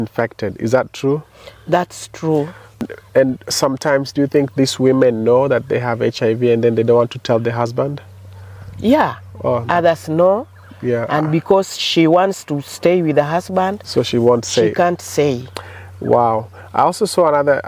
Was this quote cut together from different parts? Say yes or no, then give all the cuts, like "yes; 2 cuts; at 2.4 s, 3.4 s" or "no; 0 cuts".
yes; 1 cut; at 2.8 s